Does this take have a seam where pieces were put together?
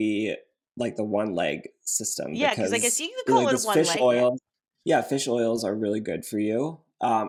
no; 0 cuts

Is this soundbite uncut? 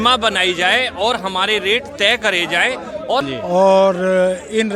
no; 1 cut; at 3.2 s

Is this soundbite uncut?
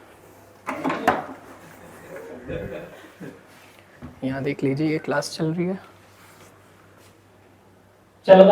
yes; 0 cuts

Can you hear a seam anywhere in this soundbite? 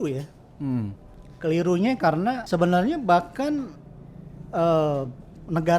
yes; 1 cut; at 2.4 s

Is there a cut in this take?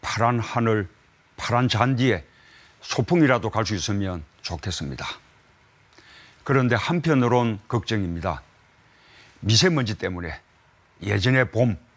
no; 0 cuts

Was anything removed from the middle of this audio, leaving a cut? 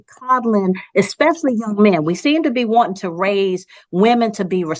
no; 0 cuts

